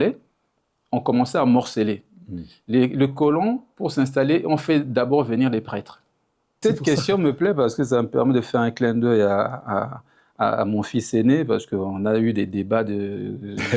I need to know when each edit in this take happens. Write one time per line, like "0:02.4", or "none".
0:06.6